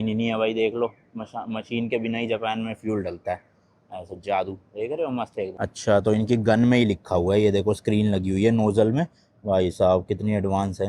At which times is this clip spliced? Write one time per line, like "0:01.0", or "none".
none